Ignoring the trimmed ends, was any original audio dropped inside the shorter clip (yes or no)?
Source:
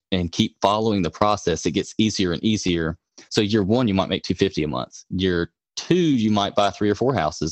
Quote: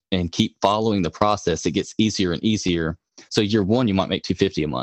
no